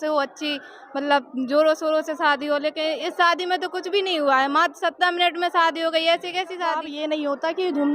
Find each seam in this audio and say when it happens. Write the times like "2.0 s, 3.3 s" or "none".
6.9 s